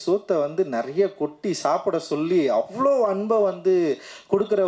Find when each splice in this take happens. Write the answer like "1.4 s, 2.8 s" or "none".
none